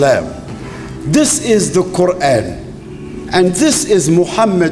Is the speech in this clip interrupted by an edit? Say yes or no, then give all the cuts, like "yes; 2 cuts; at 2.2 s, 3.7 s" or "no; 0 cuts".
no; 0 cuts